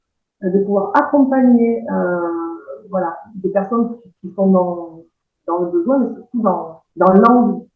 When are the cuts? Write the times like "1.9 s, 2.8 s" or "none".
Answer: 6.8 s